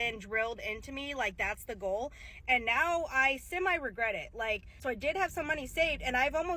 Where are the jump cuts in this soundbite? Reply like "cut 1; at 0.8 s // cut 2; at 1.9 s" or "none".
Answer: cut 1; at 4.7 s